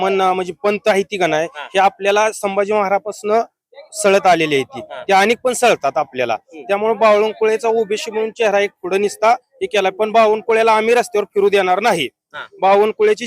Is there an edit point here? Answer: no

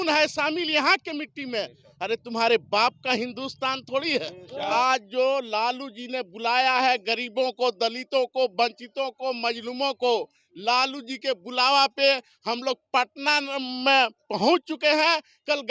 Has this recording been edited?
yes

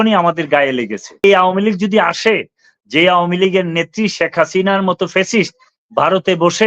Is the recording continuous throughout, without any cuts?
no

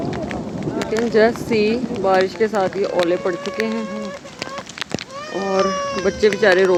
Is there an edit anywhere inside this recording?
no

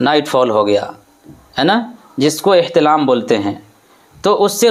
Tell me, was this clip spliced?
no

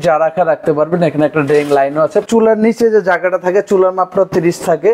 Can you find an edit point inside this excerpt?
yes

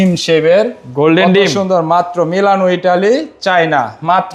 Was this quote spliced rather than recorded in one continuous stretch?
no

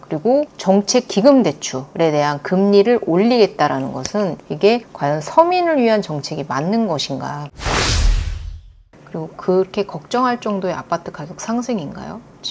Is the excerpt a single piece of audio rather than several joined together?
no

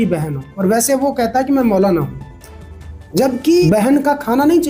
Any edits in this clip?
yes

